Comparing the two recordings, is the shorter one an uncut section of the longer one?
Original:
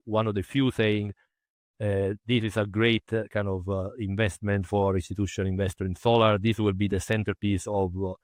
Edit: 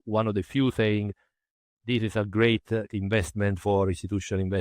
no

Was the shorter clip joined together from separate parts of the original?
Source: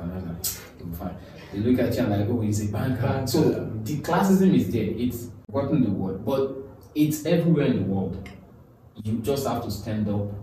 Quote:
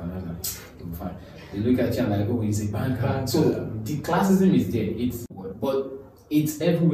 yes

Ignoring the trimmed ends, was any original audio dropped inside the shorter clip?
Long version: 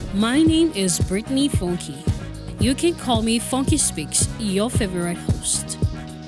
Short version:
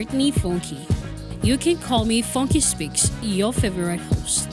no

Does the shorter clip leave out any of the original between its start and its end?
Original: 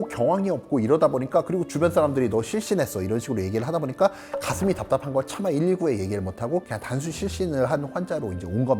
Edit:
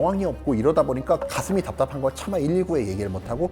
yes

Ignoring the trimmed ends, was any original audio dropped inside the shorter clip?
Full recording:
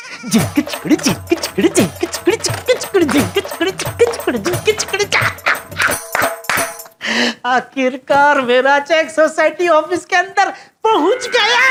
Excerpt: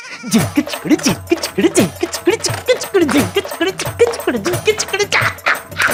no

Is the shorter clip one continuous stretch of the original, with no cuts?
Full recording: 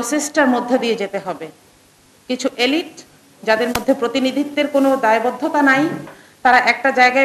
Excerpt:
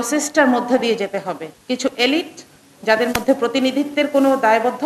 no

